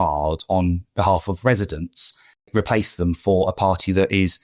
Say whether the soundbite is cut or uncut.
cut